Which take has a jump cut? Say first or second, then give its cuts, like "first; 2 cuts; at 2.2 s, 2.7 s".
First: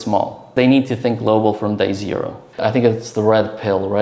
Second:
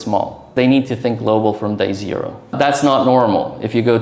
first; 1 cut; at 2.4 s